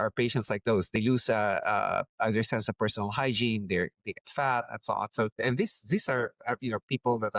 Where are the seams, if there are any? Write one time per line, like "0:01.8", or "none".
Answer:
0:01.0